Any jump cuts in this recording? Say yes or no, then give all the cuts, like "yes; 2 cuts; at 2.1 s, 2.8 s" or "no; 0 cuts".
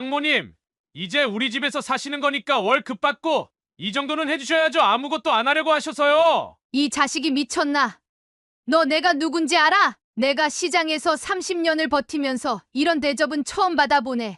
yes; 2 cuts; at 6.6 s, 10.0 s